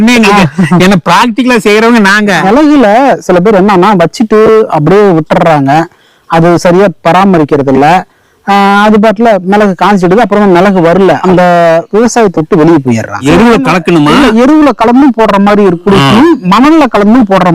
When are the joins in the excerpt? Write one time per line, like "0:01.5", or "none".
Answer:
0:02.5
0:11.2
0:13.2